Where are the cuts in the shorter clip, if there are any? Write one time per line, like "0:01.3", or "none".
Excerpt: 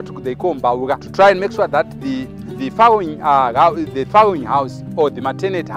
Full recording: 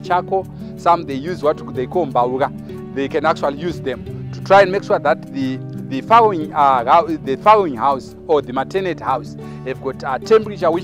0:01.1